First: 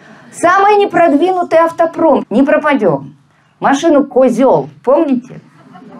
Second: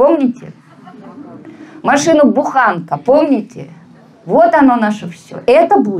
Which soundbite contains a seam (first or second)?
first